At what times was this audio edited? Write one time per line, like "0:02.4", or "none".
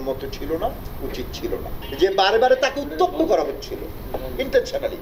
0:01.8